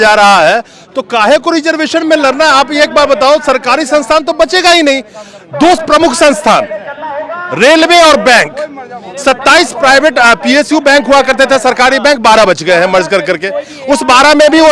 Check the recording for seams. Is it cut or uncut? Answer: uncut